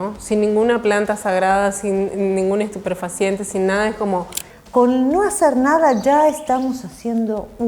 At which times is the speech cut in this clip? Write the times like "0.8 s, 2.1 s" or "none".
4.5 s